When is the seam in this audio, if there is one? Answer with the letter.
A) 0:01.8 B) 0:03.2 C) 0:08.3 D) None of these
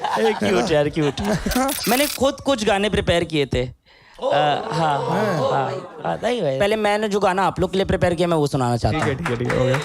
A